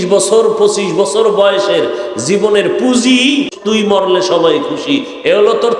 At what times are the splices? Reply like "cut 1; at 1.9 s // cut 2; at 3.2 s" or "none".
cut 1; at 3.6 s